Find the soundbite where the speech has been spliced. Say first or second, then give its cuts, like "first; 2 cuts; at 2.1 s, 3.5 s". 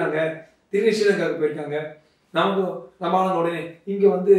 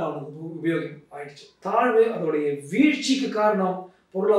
second; 1 cut; at 1.5 s